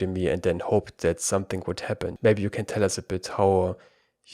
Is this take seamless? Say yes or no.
no